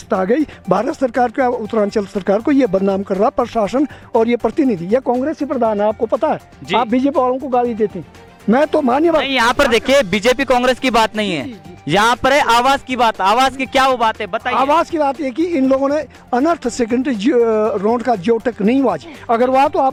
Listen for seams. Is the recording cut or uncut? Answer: uncut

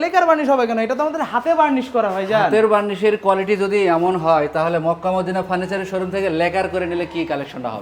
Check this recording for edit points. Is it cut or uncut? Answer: uncut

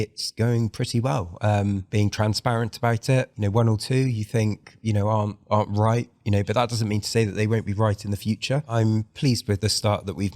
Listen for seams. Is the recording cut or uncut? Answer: cut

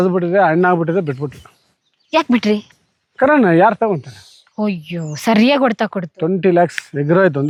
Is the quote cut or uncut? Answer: uncut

